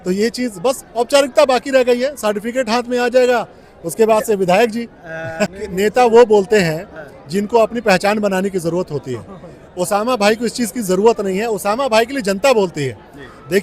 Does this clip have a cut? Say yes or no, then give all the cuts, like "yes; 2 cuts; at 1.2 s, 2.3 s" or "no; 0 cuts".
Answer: yes; 1 cut; at 5.6 s